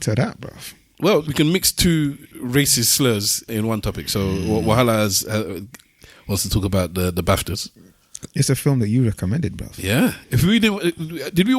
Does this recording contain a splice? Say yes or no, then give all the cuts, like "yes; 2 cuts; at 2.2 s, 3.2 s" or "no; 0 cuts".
yes; 3 cuts; at 1.3 s, 2.3 s, 3.5 s